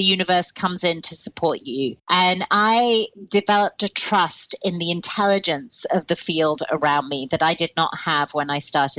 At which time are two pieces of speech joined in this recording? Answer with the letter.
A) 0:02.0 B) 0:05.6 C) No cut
A